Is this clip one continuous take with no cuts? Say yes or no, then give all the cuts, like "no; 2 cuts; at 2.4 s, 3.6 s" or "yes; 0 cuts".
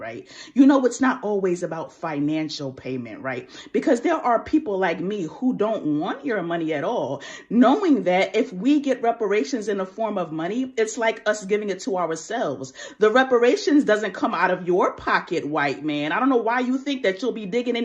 no; 2 cuts; at 5.3 s, 10.1 s